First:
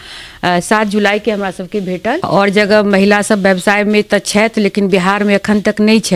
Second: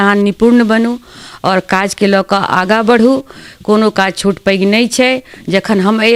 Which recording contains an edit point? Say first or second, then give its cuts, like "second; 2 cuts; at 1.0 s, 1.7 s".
first; 1 cut; at 2.2 s